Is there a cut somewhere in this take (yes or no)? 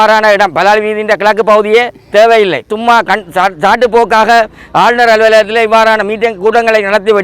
yes